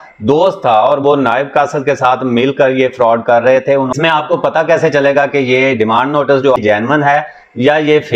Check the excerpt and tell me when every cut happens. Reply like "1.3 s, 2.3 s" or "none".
3.9 s, 6.6 s